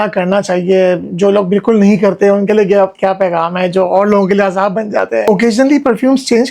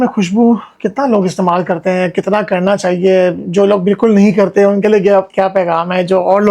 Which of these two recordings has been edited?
first; 1 cut; at 5.3 s

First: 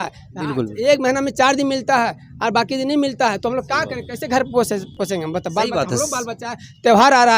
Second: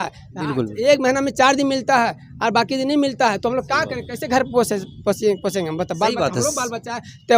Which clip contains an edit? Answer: first; 1 cut; at 4.9 s

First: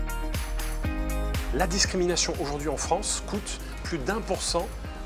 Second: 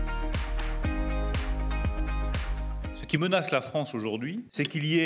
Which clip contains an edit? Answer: first; 1 cut; at 1.4 s

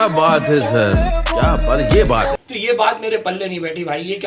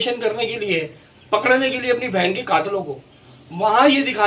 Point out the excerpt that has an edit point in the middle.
first; 1 cut; at 2.5 s

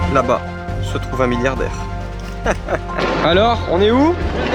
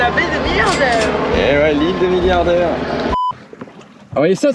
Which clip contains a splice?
second; 1 cut; at 3.1 s

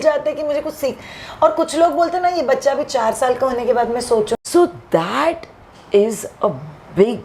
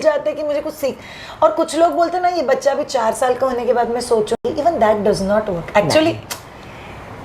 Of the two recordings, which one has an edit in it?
first; 1 cut; at 4.4 s

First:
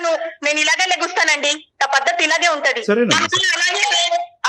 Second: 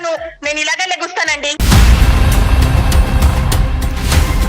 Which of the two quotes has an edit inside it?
second; 1 cut; at 1.6 s

